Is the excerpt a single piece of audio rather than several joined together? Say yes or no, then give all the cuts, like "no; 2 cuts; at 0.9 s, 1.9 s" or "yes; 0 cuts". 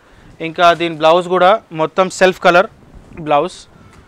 yes; 0 cuts